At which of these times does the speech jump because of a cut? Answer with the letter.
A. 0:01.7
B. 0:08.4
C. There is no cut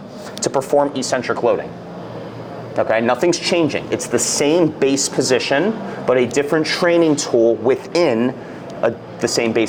C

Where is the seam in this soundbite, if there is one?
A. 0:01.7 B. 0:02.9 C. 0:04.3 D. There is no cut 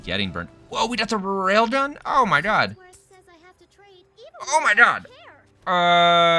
D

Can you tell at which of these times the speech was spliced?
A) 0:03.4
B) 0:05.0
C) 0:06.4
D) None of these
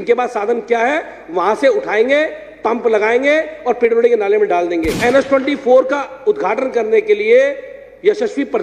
B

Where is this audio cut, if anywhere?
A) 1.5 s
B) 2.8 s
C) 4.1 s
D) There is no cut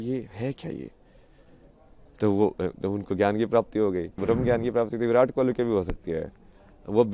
C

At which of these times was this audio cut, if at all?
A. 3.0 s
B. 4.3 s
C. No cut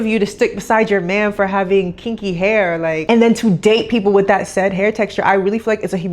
A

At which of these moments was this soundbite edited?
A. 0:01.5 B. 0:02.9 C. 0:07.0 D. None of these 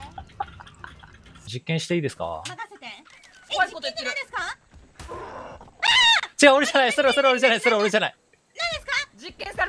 A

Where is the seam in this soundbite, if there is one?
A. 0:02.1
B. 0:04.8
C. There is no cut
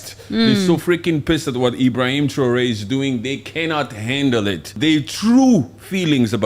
B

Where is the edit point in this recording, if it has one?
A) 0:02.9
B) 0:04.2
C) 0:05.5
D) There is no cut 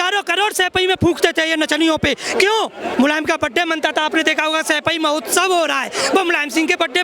A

